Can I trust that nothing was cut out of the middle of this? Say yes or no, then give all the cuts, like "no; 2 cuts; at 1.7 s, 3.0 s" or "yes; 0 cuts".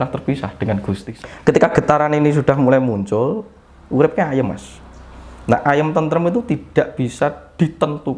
no; 1 cut; at 1.1 s